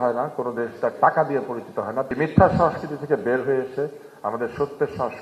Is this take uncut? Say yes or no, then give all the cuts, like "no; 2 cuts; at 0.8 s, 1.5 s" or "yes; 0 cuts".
no; 1 cut; at 2.1 s